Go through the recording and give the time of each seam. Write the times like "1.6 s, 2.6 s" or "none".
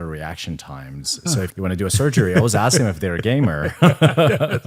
1.5 s